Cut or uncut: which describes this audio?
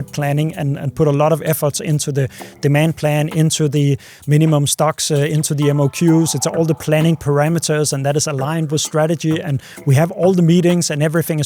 uncut